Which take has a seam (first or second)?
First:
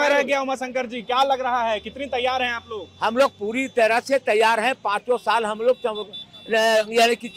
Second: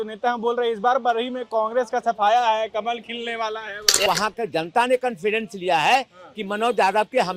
second